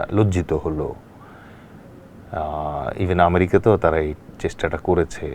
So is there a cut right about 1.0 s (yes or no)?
no